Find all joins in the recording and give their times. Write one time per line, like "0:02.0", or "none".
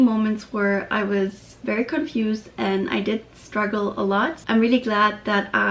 none